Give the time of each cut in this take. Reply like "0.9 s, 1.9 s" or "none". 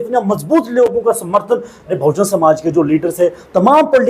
2.0 s